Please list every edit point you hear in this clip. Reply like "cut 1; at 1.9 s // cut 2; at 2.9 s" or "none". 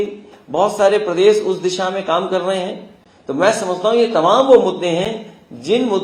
none